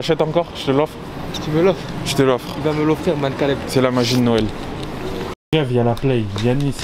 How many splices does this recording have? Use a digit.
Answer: 1